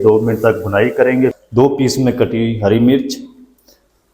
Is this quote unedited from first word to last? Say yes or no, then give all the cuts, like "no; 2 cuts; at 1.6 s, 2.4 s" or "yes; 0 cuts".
no; 1 cut; at 1.4 s